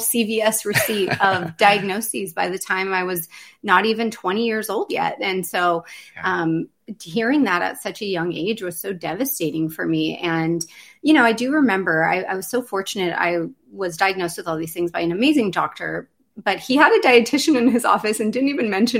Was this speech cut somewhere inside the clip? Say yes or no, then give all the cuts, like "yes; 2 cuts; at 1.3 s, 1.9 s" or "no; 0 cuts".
no; 0 cuts